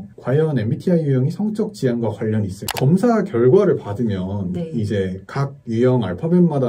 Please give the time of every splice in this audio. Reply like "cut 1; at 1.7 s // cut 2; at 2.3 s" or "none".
cut 1; at 2.6 s